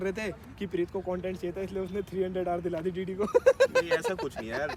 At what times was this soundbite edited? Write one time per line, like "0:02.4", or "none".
none